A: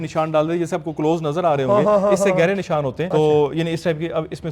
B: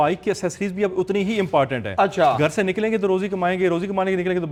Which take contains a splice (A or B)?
A